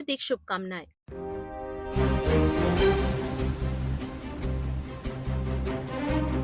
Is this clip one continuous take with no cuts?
yes; 0 cuts

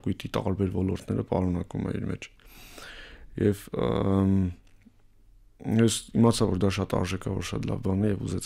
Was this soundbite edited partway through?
no; 0 cuts

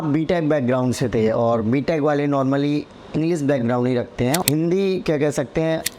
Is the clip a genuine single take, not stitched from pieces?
no; 1 cut; at 4.4 s

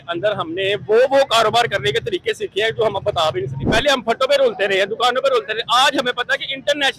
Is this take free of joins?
no; 1 cut; at 3.6 s

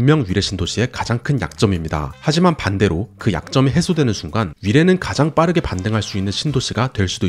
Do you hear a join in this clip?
no; 0 cuts

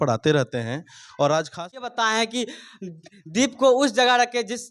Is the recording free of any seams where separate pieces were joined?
no; 1 cut; at 1.8 s

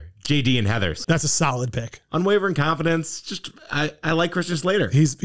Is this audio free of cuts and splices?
yes; 0 cuts

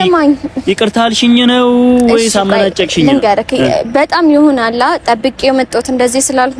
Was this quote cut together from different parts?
no; 0 cuts

